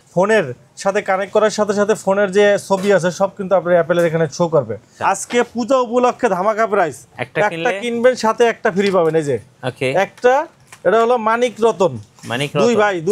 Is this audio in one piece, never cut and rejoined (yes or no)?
no